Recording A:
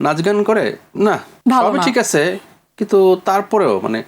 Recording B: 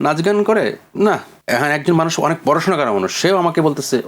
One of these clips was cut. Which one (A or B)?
B